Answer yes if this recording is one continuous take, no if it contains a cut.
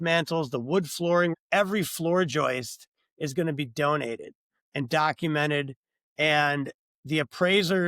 no